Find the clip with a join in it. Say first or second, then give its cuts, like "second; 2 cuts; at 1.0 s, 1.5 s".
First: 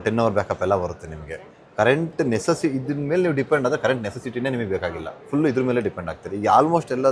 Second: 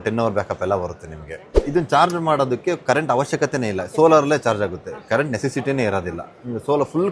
second; 1 cut; at 1.6 s